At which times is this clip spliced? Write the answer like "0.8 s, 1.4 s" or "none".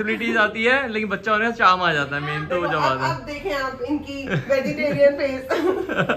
none